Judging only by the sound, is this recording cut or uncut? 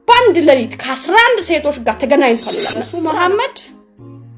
cut